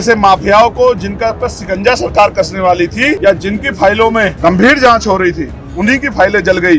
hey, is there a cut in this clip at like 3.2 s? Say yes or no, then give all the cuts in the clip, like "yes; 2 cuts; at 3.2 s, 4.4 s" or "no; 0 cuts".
yes; 2 cuts; at 3.2 s, 4.3 s